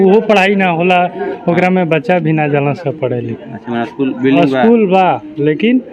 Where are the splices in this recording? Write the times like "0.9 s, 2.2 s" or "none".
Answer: none